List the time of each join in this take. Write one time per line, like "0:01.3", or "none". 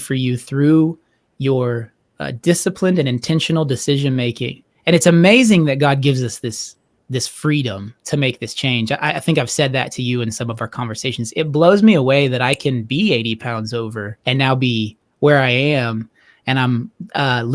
0:14.1